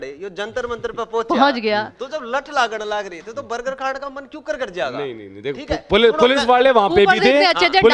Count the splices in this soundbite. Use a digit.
0